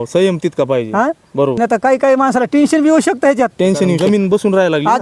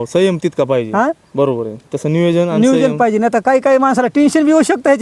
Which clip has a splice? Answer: first; 2 cuts; at 1.6 s, 4.0 s

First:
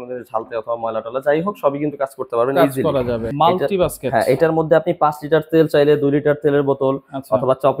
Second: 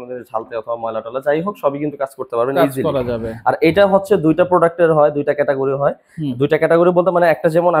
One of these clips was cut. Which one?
first; 1 cut; at 3.2 s

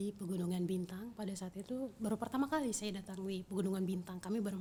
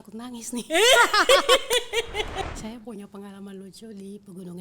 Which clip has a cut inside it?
second; 1 cut; at 2.4 s

